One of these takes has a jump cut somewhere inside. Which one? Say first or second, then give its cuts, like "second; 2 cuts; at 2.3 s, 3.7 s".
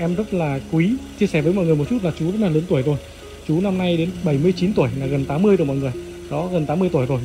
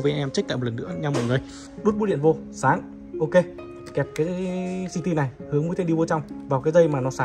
second; 1 cut; at 1.6 s